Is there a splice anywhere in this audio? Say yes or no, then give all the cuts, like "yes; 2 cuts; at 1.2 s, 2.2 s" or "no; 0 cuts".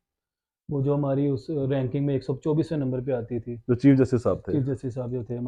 no; 0 cuts